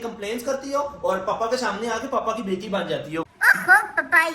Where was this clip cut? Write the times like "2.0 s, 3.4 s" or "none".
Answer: 3.2 s